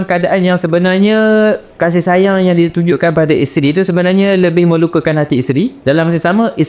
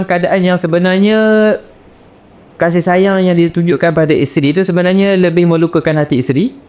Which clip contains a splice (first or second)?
first